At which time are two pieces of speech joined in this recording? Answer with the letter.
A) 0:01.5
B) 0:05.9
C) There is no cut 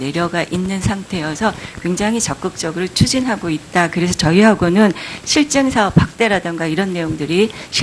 A